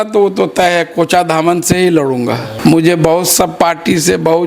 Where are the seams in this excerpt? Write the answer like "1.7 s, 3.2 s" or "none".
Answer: 2.5 s